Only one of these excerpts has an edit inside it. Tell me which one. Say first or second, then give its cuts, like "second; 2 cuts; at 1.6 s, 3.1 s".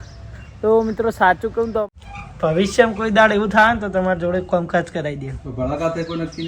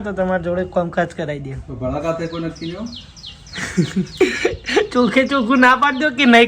first; 1 cut; at 1.9 s